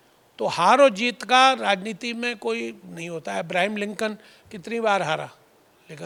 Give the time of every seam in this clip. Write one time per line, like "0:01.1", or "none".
none